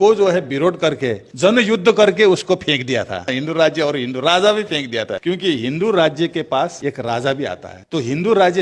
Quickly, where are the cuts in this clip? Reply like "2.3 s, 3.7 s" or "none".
1.2 s, 3.3 s, 5.1 s, 6.8 s, 7.7 s